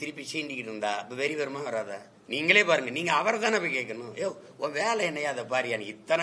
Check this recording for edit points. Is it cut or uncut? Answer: cut